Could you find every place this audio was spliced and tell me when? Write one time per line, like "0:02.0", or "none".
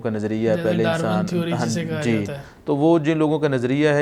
none